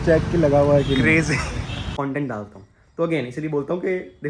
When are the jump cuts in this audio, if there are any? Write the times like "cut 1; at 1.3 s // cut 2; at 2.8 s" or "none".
cut 1; at 1.9 s